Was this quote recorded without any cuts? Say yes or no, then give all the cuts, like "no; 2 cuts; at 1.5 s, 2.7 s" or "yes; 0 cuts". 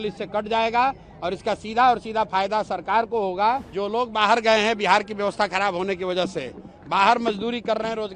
no; 1 cut; at 3.7 s